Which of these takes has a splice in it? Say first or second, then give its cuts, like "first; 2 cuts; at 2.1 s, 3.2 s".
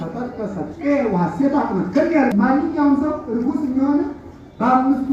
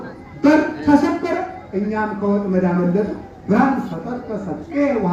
first; 1 cut; at 2.3 s